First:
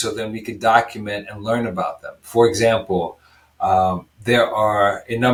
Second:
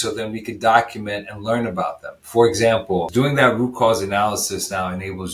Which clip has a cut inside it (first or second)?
second